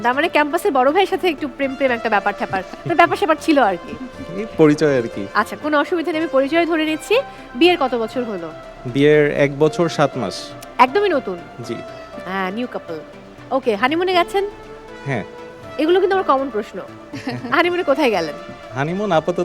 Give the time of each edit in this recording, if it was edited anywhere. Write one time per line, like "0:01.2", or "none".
none